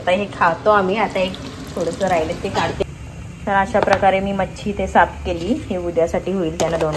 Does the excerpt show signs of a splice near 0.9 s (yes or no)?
no